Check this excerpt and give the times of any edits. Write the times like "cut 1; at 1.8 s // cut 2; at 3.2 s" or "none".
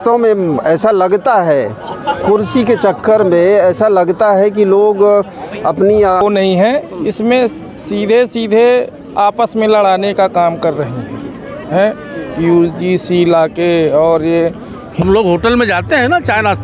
cut 1; at 6.2 s // cut 2; at 14.8 s